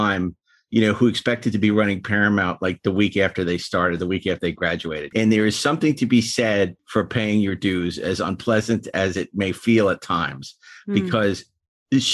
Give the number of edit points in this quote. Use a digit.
2